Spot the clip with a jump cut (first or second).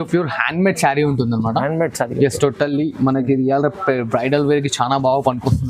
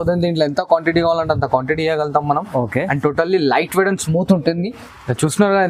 second